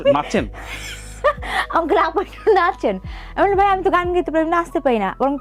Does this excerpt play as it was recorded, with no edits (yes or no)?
yes